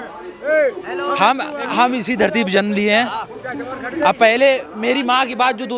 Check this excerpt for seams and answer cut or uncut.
uncut